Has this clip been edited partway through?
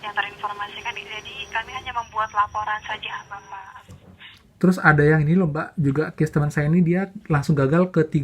yes; 1 cut; at 3.7 s

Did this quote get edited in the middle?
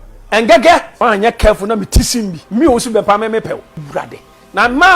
yes; 3 cuts; at 0.9 s, 2.4 s, 3.8 s

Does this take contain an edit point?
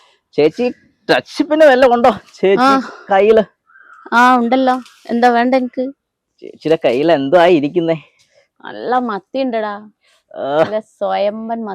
no; 0 cuts

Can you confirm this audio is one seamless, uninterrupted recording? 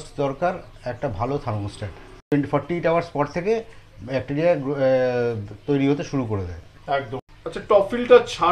no; 2 cuts; at 2.3 s, 7.3 s

